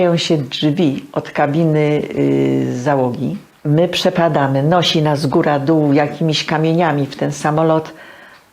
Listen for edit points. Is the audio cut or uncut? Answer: cut